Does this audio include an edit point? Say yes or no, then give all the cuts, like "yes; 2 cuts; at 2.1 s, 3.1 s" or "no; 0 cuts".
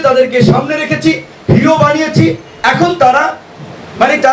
no; 0 cuts